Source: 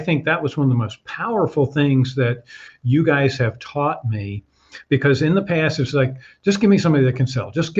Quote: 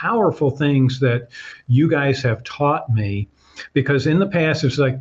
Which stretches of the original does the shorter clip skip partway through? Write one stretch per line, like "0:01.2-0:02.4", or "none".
none